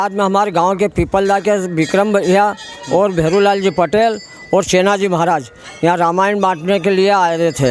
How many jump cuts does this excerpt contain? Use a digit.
0